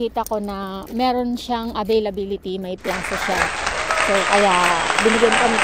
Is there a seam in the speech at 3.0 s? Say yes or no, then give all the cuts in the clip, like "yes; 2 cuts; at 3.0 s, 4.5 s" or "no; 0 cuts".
no; 0 cuts